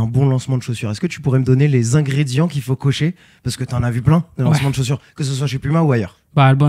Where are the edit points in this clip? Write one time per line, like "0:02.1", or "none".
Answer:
none